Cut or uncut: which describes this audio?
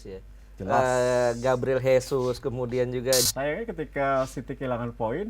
cut